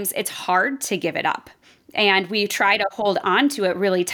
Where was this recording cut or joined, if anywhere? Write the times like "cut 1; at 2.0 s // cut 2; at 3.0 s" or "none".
none